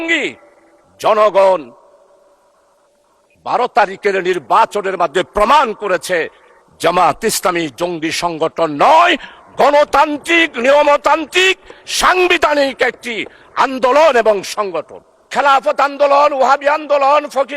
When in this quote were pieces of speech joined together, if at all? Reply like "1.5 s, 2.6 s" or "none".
15.3 s